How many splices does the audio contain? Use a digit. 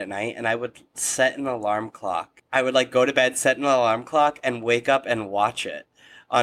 1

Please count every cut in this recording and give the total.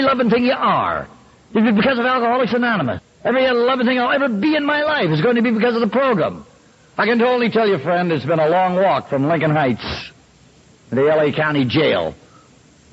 1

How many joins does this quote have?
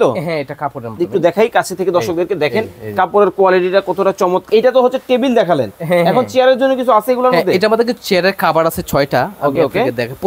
1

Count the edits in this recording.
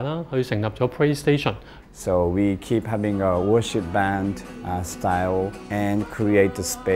2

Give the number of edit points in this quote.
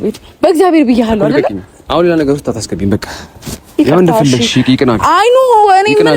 0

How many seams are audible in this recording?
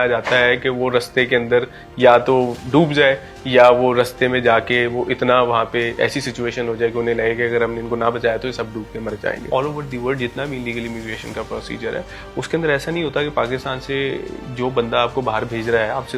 1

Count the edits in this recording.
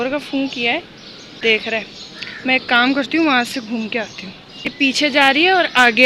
1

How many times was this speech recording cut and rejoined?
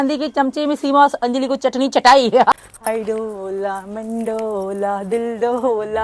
1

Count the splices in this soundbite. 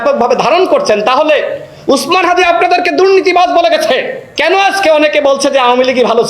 1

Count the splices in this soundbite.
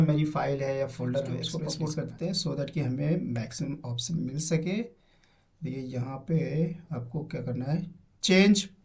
1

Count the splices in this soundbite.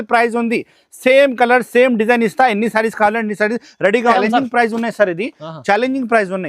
1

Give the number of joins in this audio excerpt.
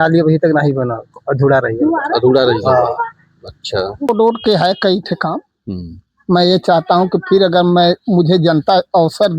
1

